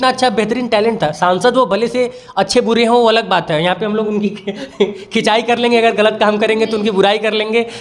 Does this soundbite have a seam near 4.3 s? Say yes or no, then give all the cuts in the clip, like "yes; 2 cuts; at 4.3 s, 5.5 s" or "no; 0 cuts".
no; 0 cuts